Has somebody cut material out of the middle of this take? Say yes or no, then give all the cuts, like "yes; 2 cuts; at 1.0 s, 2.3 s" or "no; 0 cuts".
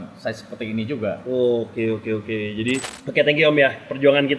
yes; 1 cut; at 3.0 s